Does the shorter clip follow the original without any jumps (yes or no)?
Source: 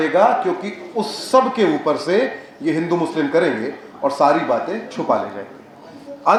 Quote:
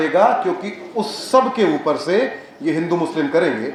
yes